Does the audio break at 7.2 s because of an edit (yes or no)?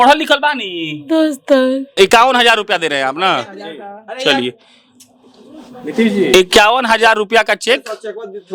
no